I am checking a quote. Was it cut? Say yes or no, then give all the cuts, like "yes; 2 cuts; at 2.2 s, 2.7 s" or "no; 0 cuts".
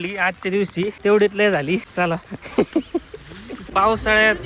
yes; 3 cuts; at 0.9 s, 2.1 s, 3.7 s